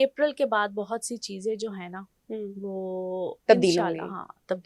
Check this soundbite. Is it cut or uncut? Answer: uncut